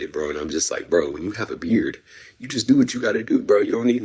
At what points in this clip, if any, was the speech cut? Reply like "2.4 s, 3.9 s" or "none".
none